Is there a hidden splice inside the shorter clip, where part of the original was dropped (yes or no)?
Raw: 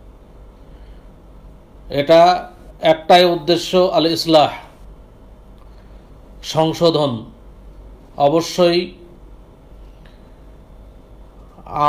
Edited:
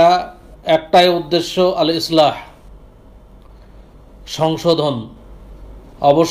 no